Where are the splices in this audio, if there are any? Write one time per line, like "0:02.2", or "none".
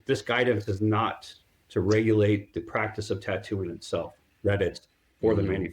0:04.2